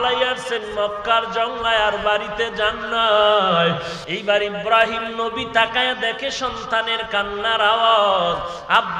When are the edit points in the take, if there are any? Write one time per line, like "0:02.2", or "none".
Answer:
0:04.0